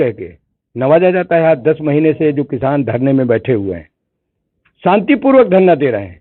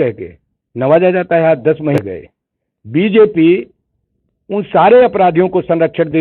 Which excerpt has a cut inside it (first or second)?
second